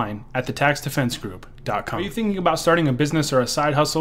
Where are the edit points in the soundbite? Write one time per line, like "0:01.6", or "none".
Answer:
0:02.1